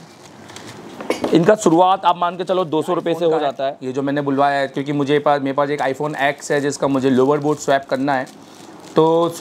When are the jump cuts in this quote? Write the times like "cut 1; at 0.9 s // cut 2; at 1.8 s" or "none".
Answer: cut 1; at 3.8 s